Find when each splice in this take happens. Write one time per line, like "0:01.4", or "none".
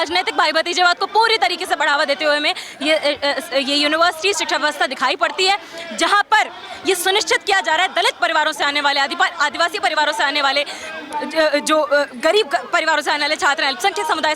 none